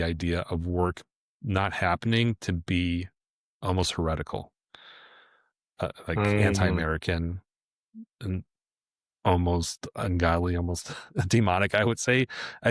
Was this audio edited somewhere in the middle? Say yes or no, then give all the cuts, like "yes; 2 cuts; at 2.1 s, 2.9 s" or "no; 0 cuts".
no; 0 cuts